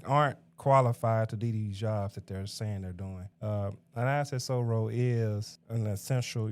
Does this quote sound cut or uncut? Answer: cut